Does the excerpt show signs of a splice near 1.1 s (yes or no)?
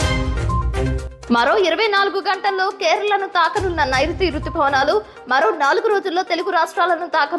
yes